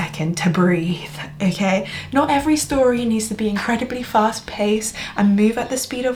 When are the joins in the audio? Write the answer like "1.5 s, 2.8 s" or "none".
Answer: none

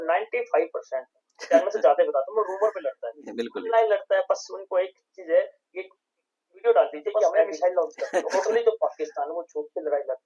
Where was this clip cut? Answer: 8.1 s

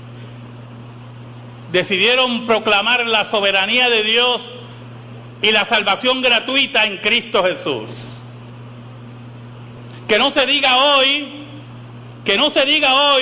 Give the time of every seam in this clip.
2.3 s

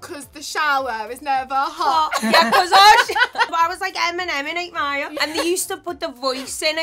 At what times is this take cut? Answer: 3.5 s, 5.2 s

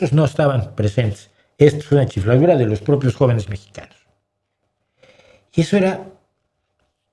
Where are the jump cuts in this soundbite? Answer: none

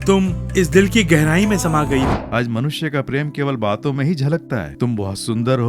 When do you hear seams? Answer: 2.1 s

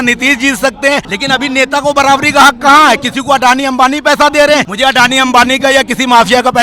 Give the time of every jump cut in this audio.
1.1 s, 4.7 s

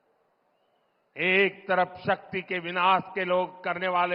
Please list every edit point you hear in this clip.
none

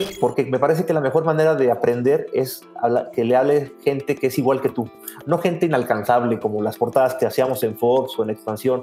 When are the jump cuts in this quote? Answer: none

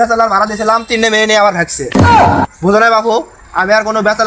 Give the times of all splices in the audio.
none

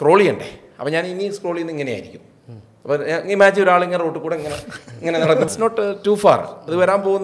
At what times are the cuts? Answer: 5.5 s

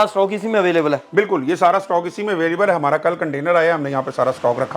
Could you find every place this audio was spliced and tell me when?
none

